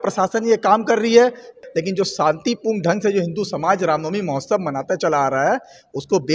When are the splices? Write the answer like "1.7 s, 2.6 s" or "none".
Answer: 1.6 s